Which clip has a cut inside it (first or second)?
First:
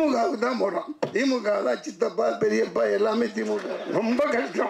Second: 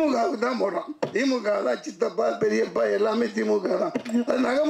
first